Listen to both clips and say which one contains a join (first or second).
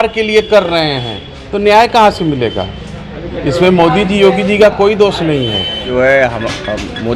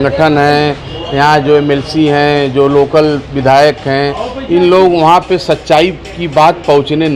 first